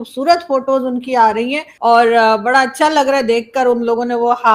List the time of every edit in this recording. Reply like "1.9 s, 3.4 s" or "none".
1.6 s